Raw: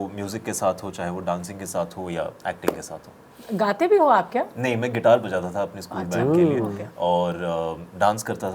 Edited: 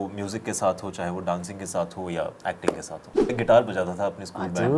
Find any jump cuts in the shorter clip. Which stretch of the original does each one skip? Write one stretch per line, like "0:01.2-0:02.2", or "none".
0:03.3-0:04.9